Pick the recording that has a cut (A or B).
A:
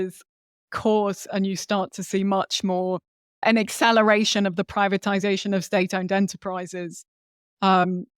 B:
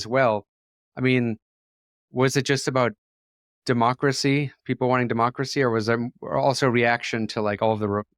A